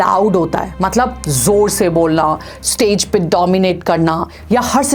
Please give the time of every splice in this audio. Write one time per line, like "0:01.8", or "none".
none